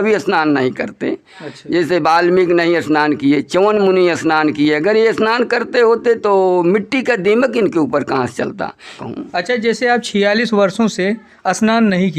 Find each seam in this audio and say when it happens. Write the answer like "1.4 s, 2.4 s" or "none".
9.0 s